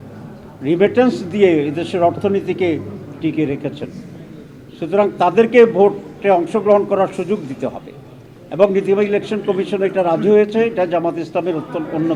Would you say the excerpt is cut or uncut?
uncut